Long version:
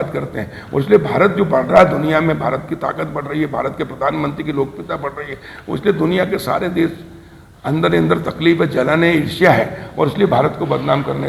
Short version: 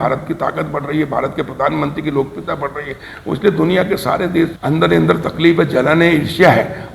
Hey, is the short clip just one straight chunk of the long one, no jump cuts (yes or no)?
no